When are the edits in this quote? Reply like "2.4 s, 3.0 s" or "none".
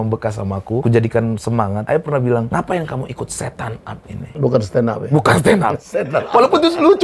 0.8 s, 1.8 s, 2.5 s, 4.3 s

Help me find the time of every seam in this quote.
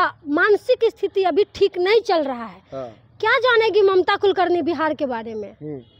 none

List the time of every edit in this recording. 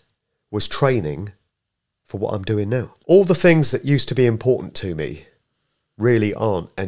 2.9 s

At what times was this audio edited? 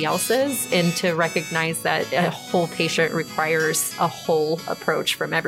2.1 s, 3.9 s

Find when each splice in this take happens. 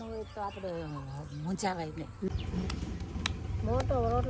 2.3 s

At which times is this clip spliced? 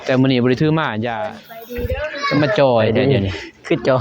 1.0 s

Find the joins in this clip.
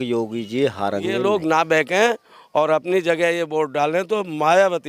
1.2 s

